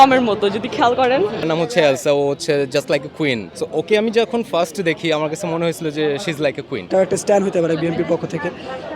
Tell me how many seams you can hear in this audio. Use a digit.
3